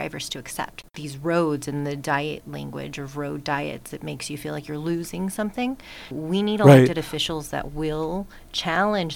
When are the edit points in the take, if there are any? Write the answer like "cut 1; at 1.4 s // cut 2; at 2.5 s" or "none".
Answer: cut 1; at 0.9 s // cut 2; at 6.1 s